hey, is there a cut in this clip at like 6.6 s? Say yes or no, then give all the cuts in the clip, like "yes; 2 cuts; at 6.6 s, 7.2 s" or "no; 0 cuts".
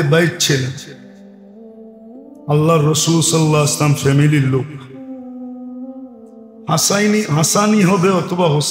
yes; 4 cuts; at 0.8 s, 2.5 s, 4.9 s, 6.6 s